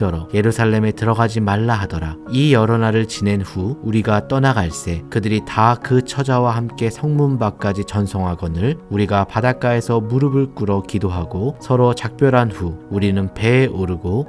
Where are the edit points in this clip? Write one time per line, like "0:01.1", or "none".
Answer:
0:02.1

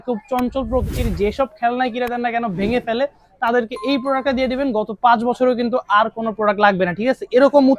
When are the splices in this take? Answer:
none

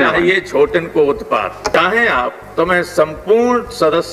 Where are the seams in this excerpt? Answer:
0:01.6

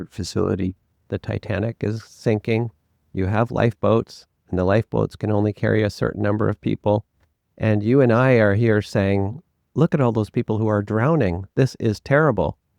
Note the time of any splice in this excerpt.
0:00.9

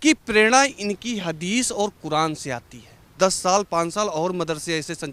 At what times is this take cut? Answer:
0:03.1

